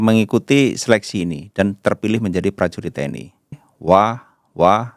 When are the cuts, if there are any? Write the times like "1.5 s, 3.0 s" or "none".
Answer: 3.7 s